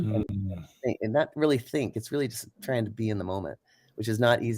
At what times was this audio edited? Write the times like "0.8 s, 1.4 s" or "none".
none

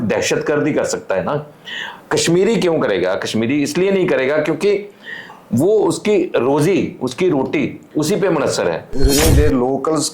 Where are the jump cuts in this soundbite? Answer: 9.1 s

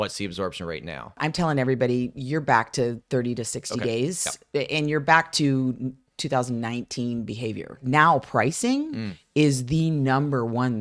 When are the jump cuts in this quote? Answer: 1.2 s, 7.8 s

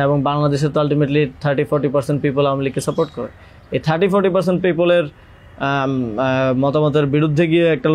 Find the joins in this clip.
none

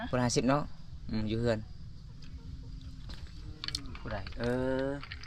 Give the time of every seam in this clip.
none

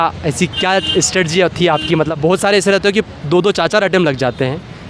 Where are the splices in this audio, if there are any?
2.1 s

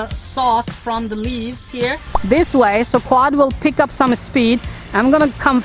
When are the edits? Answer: 2.1 s

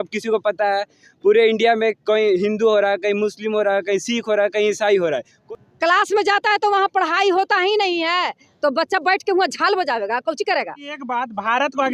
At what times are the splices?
5.4 s, 11.0 s

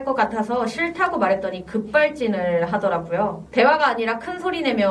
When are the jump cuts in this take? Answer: 3.4 s

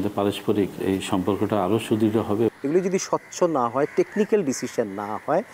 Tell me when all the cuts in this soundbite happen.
2.5 s

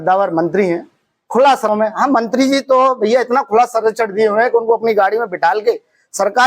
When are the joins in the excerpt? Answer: 1.7 s

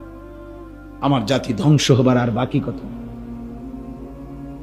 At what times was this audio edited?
0.8 s, 3.2 s

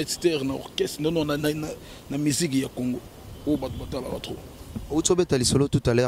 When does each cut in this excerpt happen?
none

